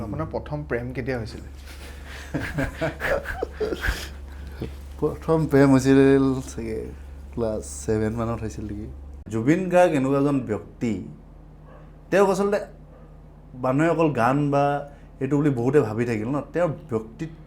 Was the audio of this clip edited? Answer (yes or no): yes